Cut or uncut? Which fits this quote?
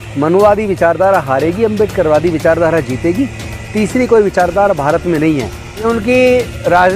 cut